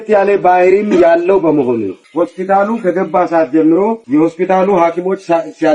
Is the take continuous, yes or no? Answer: no